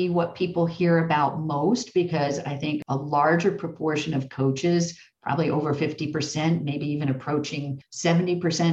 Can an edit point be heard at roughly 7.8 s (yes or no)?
yes